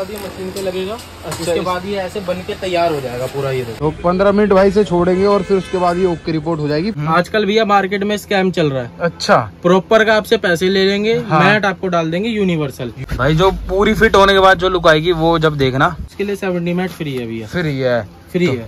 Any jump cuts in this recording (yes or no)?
yes